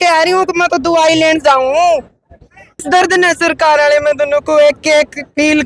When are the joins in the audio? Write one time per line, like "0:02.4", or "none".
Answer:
0:02.8